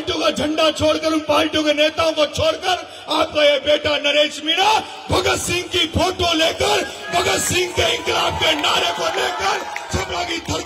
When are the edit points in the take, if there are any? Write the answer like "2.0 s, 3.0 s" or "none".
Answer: none